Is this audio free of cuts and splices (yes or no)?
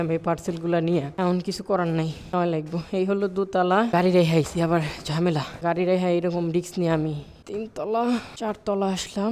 no